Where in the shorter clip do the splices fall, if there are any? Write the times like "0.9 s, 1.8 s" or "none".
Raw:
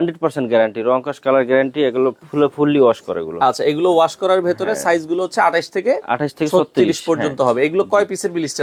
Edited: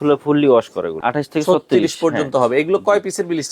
1.0 s